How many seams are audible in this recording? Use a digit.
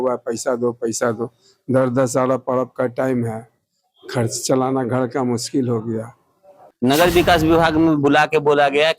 1